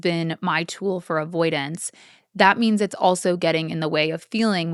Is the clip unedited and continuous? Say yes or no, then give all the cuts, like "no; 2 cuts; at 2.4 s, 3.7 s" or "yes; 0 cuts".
yes; 0 cuts